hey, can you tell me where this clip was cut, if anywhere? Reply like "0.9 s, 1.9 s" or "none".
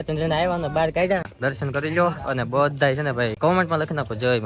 1.3 s, 3.3 s